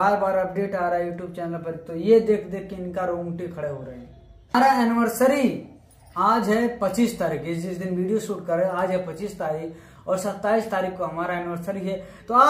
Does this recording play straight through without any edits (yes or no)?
no